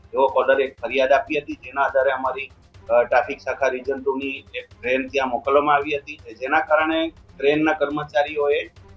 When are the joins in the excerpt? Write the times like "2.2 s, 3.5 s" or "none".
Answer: 6.3 s